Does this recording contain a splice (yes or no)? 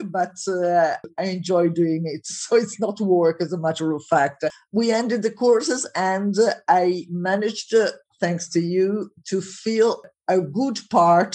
yes